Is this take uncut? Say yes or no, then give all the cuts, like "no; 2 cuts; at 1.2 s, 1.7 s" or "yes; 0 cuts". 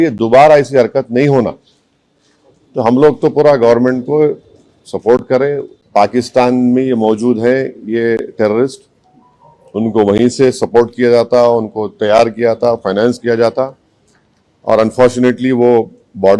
no; 1 cut; at 5.7 s